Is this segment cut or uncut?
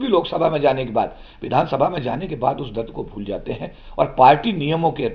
uncut